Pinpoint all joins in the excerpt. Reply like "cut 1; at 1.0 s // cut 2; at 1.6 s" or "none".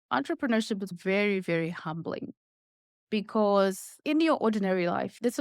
none